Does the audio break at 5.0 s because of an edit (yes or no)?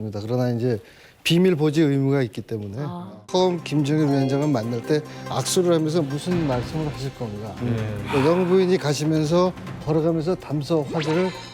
no